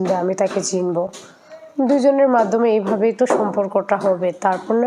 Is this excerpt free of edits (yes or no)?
yes